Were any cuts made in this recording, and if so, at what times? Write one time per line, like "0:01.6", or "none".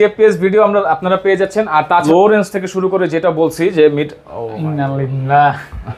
0:02.1